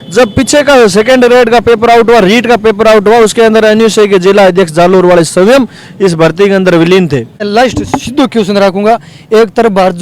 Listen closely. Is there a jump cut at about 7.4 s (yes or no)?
yes